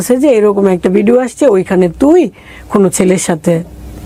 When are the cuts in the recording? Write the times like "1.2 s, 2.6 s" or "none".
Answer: none